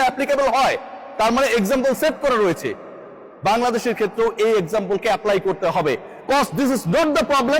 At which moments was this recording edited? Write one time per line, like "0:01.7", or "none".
none